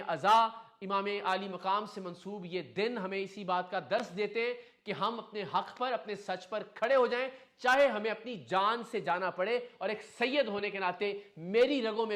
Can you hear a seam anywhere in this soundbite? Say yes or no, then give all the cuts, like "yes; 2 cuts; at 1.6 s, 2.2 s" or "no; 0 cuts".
no; 0 cuts